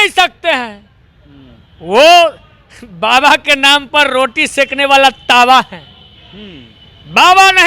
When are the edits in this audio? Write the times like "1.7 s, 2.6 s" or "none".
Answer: none